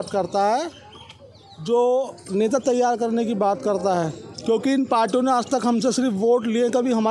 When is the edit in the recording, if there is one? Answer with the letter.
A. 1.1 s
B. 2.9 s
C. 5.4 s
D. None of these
D